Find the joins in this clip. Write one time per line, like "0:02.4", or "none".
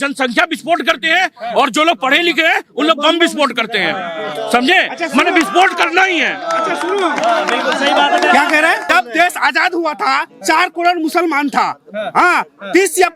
0:08.8

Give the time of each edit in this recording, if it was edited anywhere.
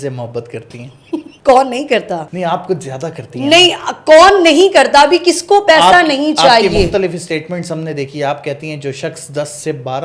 0:01.3
0:02.3

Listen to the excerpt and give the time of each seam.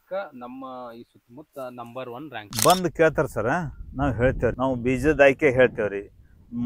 0:02.5
0:04.5

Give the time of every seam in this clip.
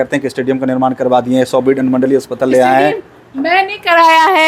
none

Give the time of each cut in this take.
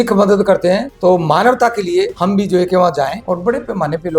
0:00.9
0:02.1
0:03.2

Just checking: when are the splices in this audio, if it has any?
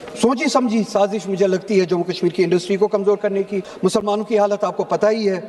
0:03.6

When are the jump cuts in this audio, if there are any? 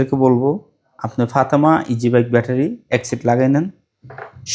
none

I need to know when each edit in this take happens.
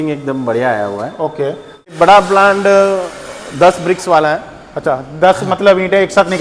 0:01.9

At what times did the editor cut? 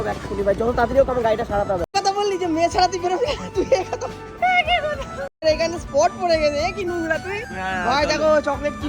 0:01.9
0:05.4

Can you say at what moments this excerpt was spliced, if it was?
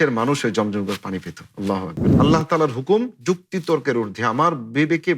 0:02.1

